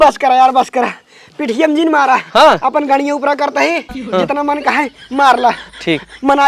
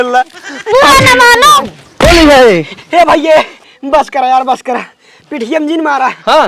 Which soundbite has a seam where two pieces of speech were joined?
second; 1 cut; at 1.6 s

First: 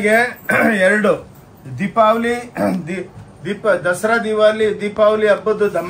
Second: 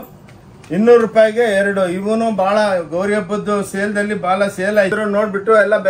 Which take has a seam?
second; 1 cut; at 4.9 s

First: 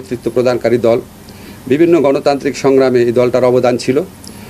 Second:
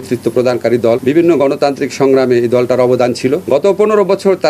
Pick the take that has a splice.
second; 2 cuts; at 1.0 s, 3.4 s

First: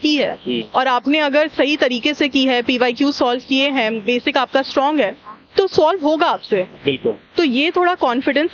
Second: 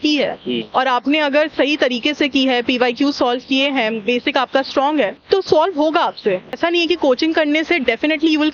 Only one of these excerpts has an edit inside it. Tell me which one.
second; 2 cuts; at 5.2 s, 6.5 s

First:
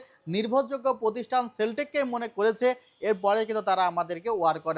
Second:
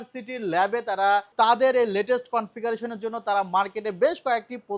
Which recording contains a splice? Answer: second; 1 cut; at 1.3 s

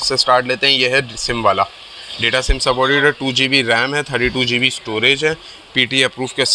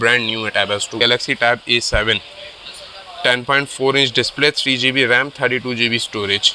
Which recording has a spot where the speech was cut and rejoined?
second; 1 cut; at 1.0 s

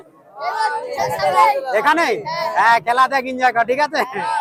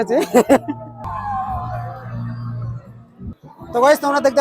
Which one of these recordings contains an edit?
second; 2 cuts; at 1.1 s, 3.4 s

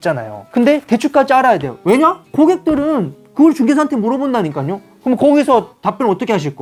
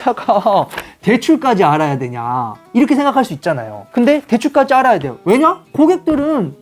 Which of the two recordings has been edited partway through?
first; 1 cut; at 4.8 s

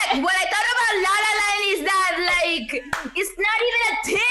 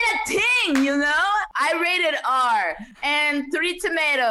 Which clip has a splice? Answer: second; 2 cuts; at 1.5 s, 2.9 s

